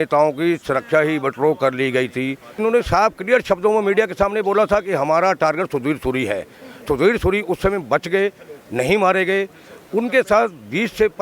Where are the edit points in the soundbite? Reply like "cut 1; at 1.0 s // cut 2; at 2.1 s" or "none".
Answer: cut 1; at 2.6 s